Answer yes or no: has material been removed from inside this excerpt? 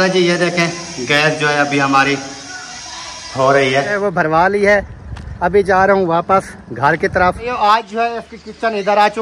yes